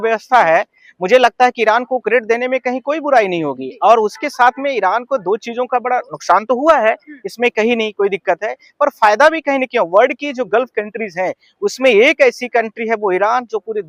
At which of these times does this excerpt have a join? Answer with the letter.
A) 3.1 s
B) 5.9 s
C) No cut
C